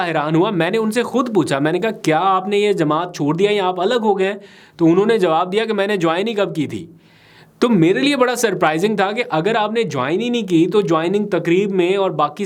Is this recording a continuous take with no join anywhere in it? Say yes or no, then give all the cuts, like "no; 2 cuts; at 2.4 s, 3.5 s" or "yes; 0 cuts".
yes; 0 cuts